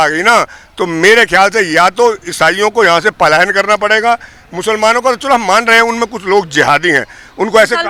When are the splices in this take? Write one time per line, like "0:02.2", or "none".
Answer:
none